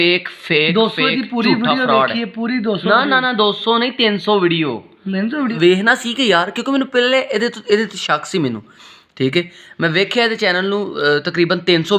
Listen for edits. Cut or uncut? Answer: cut